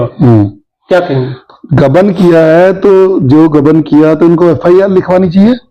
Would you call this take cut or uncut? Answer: uncut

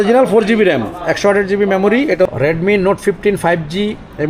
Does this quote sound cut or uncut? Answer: cut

